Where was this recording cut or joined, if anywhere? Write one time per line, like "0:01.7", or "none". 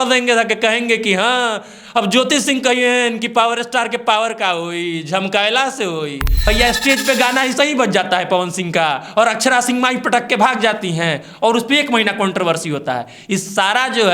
0:06.5